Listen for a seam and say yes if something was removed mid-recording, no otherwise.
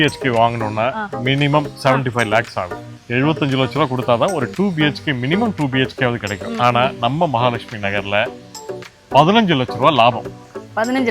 yes